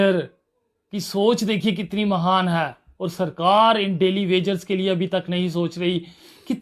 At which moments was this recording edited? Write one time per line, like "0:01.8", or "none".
none